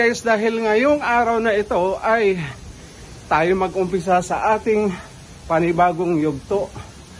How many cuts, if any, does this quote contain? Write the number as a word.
zero